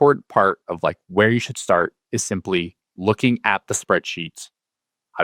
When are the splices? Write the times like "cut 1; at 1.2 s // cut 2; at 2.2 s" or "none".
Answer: none